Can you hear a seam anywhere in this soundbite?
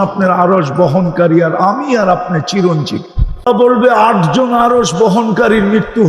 yes; 1 cut; at 3.5 s

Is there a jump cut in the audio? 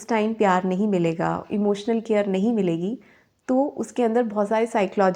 no; 0 cuts

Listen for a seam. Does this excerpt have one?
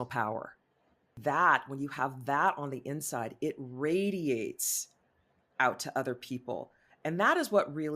yes; 1 cut; at 1.2 s

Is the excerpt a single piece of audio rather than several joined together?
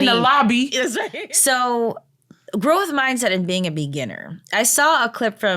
no; 1 cut; at 1.1 s

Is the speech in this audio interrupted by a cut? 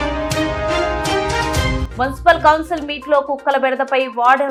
no; 0 cuts

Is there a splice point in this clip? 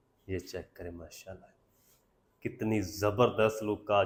no; 0 cuts

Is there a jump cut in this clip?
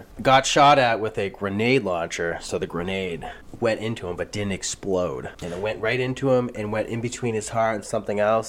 no; 0 cuts

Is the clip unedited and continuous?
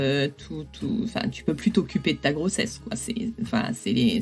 yes; 0 cuts

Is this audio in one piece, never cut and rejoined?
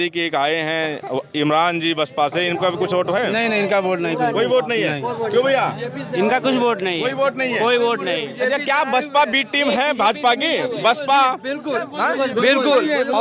yes; 0 cuts

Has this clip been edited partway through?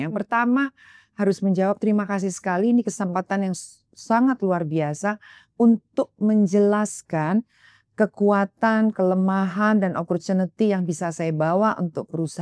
no; 0 cuts

